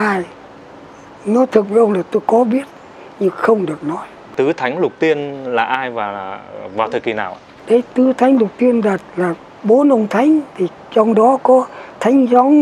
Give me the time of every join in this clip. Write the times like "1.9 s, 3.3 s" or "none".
none